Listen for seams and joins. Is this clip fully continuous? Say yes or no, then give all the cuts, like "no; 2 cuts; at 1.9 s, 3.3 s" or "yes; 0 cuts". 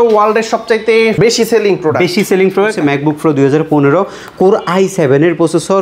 no; 1 cut; at 2.7 s